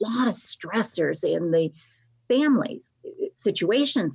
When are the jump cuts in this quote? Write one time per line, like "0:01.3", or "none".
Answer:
none